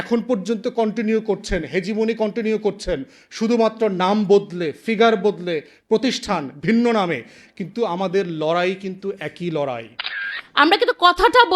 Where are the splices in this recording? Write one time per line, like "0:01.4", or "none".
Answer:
0:10.2